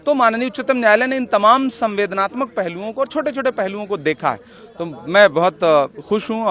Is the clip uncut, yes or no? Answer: yes